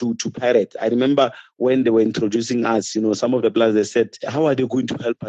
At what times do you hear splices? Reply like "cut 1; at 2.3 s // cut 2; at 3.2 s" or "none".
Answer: cut 1; at 4.3 s